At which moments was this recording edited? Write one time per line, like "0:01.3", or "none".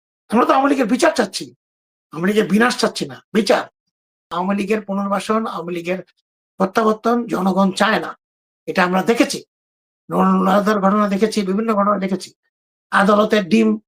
0:04.3